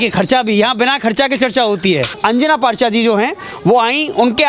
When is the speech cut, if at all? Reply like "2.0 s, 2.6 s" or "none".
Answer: 2.1 s